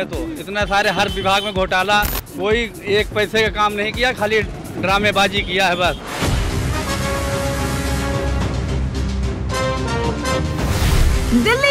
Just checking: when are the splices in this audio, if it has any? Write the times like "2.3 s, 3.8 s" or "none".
2.2 s, 6.0 s